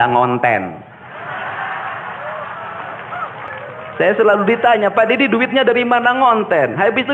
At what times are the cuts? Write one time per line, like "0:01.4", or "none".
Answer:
0:03.5

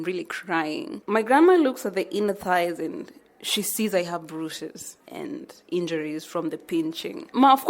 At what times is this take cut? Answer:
0:00.9

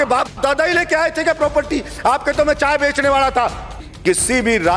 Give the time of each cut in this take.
0:03.9

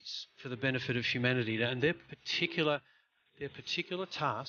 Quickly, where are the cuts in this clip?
0:01.1

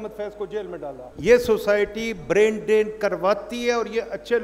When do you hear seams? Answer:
0:01.0

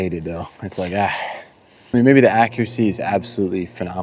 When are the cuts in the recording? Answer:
0:01.7

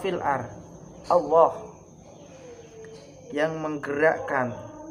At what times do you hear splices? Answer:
none

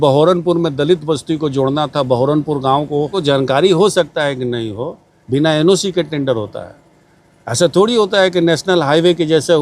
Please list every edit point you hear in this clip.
0:03.2

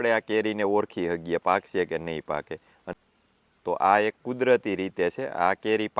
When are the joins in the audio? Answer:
0:02.9

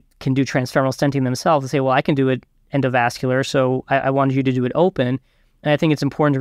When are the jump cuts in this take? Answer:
none

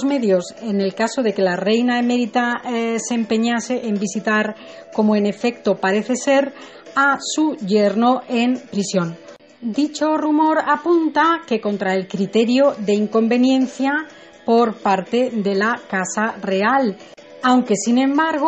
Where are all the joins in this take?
0:01.8

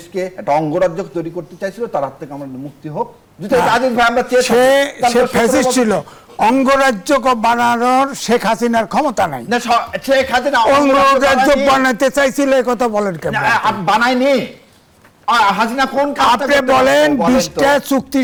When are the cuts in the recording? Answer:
none

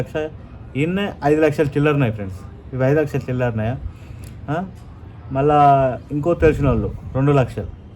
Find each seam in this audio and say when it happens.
none

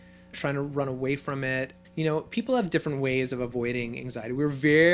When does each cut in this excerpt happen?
0:01.8

